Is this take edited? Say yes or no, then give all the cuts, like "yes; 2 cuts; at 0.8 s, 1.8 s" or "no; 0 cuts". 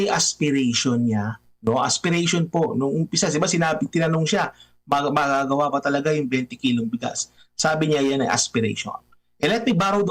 no; 0 cuts